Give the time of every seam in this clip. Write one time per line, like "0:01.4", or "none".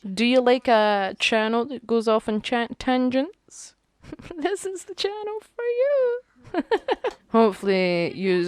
0:07.1

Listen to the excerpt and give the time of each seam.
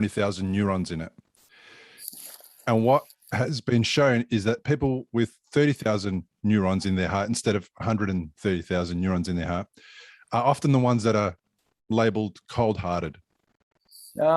none

